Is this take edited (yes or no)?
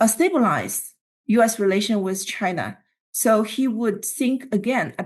no